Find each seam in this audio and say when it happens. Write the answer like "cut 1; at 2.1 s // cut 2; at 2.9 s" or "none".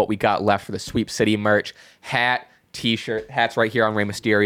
none